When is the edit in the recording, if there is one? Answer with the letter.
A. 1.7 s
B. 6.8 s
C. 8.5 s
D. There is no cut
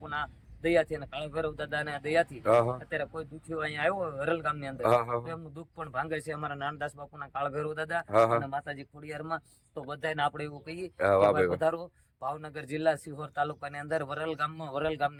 D